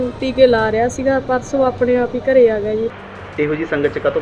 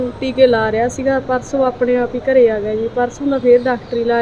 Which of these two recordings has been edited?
first; 1 cut; at 2.9 s

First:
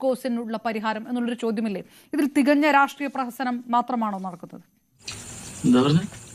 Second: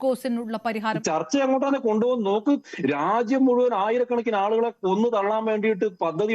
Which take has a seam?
second; 1 cut; at 1.0 s

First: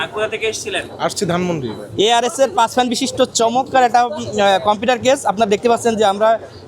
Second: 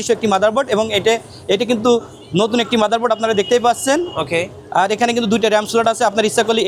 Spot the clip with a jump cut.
first; 1 cut; at 1.8 s

